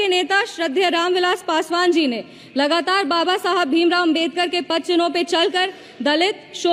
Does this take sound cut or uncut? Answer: uncut